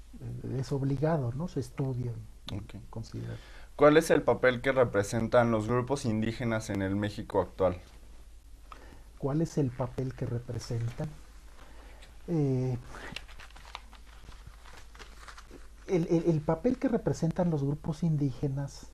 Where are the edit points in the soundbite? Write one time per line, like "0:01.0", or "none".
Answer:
0:07.5

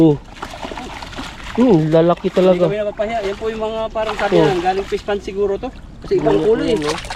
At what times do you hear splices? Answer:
none

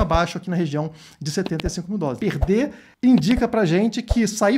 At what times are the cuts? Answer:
0:02.2

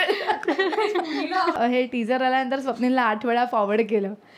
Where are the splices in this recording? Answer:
0:01.6

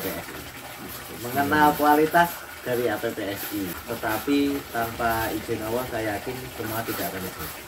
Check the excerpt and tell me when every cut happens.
0:03.8

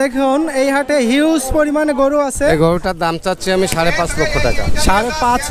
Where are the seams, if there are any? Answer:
0:02.5

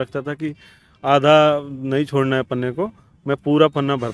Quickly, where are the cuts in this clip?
none

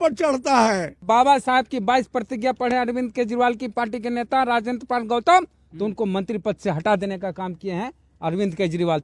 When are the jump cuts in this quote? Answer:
0:01.0

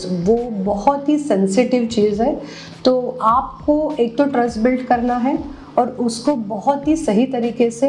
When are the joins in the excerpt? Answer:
none

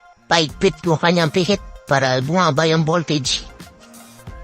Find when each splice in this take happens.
0:03.3

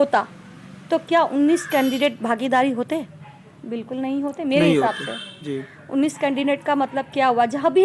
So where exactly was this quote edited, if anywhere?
none

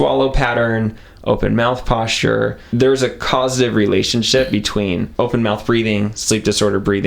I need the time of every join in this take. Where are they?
0:02.6
0:05.1

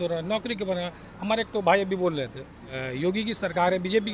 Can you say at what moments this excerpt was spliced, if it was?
0:02.8

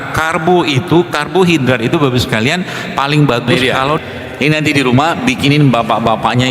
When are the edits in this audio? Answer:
0:04.0

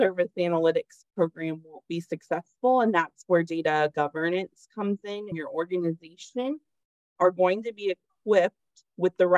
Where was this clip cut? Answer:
0:05.3

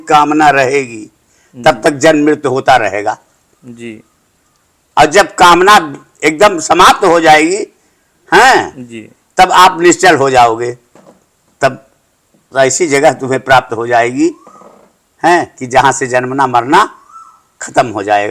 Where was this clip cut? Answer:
none

